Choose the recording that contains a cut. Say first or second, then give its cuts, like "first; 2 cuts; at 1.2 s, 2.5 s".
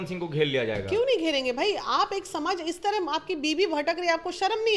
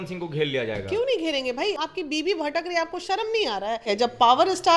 second; 2 cuts; at 1.8 s, 3.9 s